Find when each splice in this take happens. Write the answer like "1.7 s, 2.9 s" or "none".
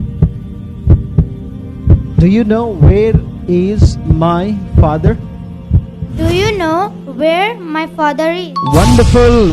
1.7 s